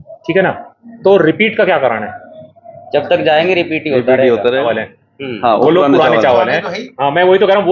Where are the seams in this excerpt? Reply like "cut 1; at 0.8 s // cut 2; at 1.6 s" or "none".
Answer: cut 1; at 4.7 s